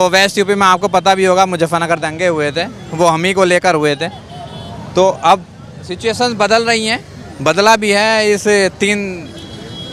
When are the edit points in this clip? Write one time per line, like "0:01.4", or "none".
none

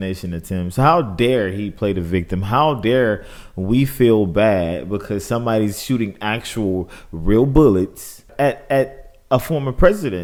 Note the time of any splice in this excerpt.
none

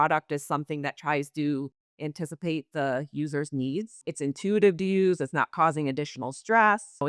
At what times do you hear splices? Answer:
none

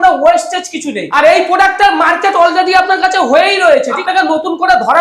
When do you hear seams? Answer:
0:01.1
0:03.9

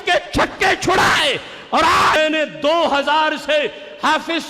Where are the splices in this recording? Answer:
0:02.2

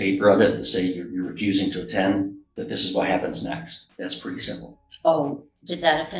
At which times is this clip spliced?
0:03.8

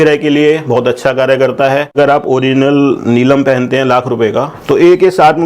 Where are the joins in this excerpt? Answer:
0:02.0

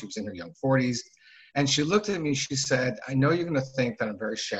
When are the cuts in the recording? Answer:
none

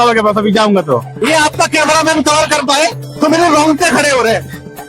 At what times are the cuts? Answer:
0:01.1

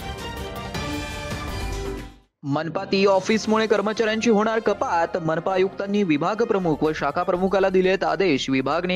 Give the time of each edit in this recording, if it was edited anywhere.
0:02.0

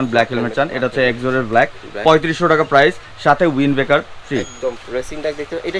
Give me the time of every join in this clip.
0:04.8

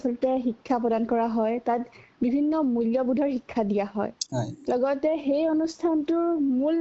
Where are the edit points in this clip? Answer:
none

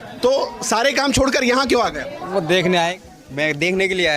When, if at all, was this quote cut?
0:02.9

